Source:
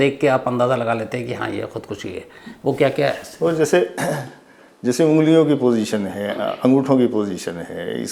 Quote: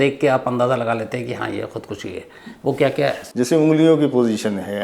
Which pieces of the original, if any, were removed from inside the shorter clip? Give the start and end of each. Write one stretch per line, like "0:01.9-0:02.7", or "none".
0:03.2-0:04.7